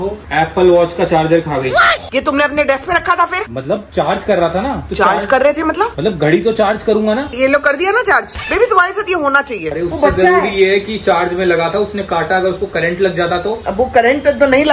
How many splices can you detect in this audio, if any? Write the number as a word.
three